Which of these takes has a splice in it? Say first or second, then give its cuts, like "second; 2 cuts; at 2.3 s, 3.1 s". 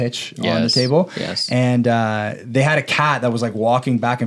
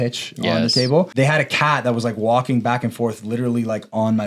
second; 1 cut; at 1.1 s